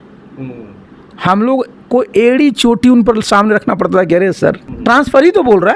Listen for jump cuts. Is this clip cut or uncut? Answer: cut